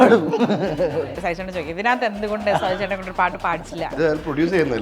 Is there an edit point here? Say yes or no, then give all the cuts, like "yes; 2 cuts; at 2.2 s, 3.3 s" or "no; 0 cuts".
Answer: yes; 2 cuts; at 1.1 s, 3.9 s